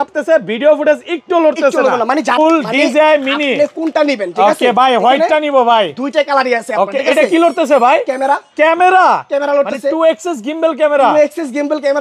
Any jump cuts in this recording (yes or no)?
yes